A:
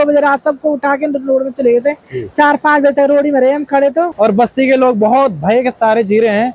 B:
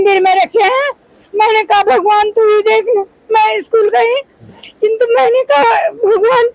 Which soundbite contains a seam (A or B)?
A